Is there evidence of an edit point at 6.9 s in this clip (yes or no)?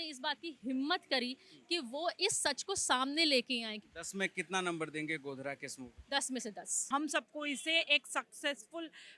yes